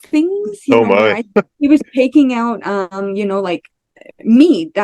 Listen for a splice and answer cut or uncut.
cut